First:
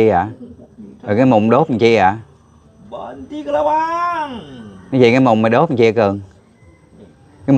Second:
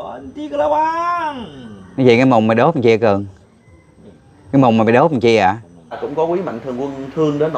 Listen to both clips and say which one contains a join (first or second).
second